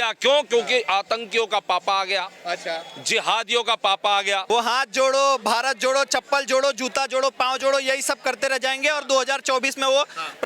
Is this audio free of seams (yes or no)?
no